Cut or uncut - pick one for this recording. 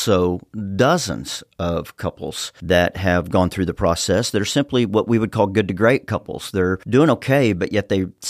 uncut